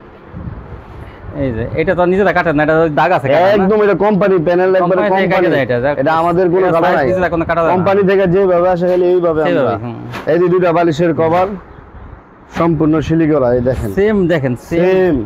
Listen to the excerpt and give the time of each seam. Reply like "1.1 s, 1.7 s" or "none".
none